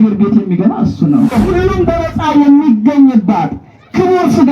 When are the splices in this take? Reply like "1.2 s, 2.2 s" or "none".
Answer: 1.3 s